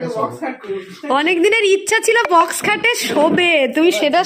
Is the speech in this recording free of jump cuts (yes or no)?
yes